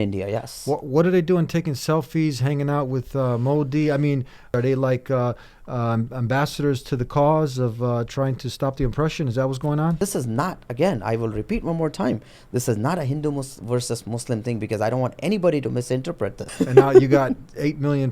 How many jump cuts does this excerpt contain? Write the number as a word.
three